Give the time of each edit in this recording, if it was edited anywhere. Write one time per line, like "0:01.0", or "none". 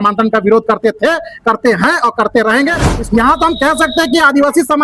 0:02.9